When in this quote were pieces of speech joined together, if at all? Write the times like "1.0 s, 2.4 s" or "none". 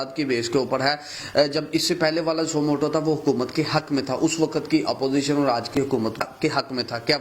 6.2 s